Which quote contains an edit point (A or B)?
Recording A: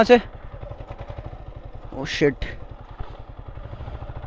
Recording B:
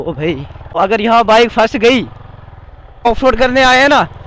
B